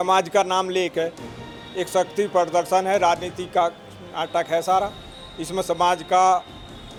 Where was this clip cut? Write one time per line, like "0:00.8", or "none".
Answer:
none